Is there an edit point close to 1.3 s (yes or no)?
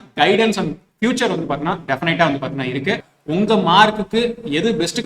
no